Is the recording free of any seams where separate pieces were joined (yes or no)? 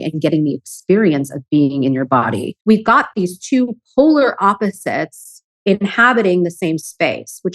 no